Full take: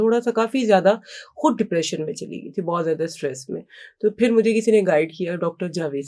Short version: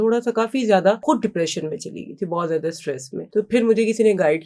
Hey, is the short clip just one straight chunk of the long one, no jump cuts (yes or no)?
no